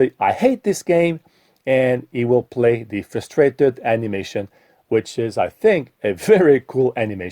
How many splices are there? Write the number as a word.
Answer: zero